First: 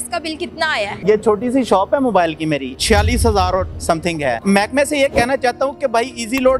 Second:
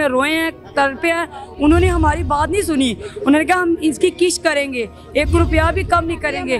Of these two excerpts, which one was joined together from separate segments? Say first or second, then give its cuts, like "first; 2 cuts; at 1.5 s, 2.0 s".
first; 3 cuts; at 1.0 s, 2.7 s, 4.4 s